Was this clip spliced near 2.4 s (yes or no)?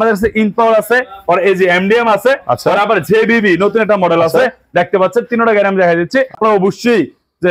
no